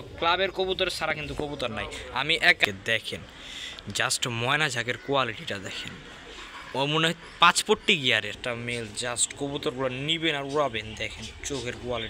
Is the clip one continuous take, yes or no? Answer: no